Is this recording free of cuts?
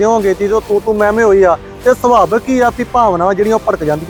yes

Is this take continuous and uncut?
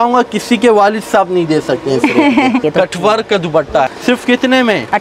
no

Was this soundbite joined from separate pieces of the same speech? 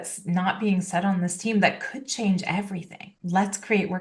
yes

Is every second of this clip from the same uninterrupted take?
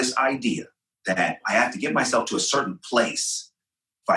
no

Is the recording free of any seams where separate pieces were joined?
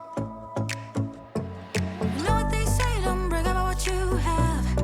no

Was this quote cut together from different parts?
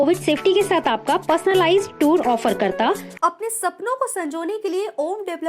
yes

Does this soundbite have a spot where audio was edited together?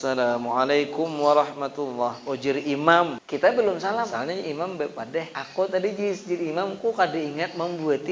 yes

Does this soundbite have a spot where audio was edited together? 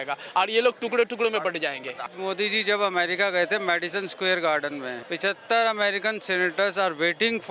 yes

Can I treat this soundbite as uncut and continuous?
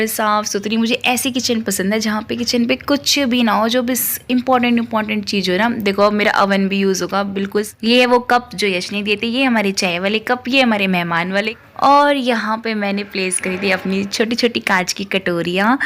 no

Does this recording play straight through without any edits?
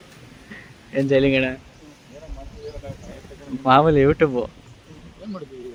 yes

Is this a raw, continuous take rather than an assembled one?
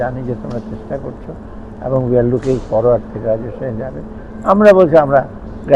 yes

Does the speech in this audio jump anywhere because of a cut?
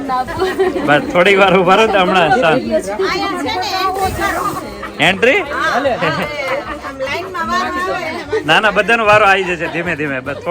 no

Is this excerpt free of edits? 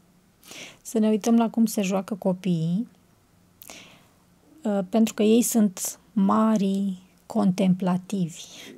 yes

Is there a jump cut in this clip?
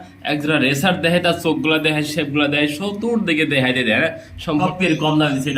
yes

